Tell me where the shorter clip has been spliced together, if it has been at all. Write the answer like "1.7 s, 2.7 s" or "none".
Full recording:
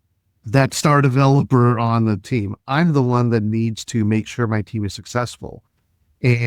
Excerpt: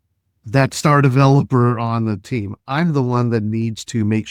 none

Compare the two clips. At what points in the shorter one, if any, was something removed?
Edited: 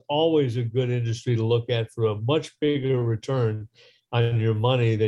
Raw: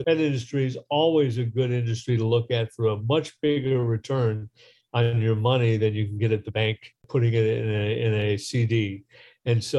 none

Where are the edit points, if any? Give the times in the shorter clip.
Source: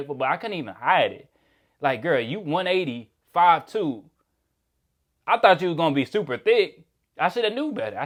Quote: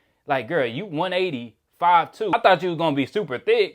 2.3 s

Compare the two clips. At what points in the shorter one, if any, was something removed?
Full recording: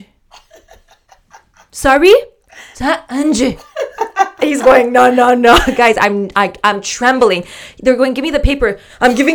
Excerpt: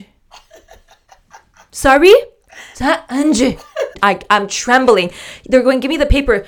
3.9 s

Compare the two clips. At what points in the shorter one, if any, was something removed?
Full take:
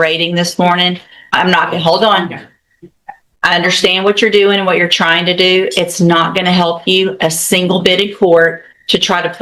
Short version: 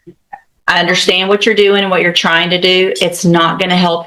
none

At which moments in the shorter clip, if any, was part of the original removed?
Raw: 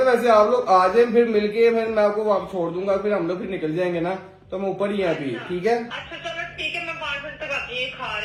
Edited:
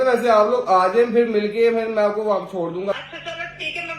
2.9 s

